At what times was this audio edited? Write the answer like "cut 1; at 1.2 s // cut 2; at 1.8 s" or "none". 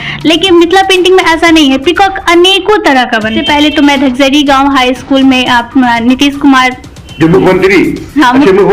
cut 1; at 3.4 s